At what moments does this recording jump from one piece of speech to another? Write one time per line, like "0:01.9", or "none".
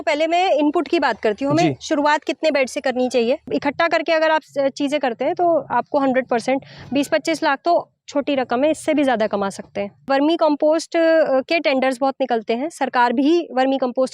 0:03.5
0:10.1